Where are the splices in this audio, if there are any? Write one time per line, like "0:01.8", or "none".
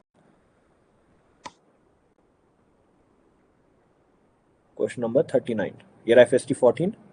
none